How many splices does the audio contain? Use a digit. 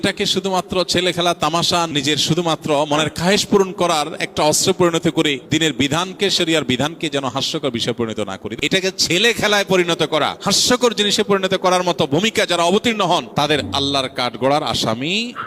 5